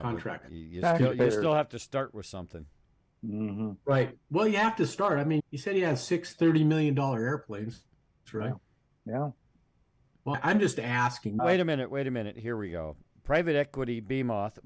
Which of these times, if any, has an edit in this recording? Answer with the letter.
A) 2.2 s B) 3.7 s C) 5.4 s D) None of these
C